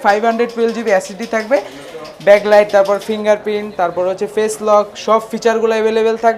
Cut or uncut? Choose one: uncut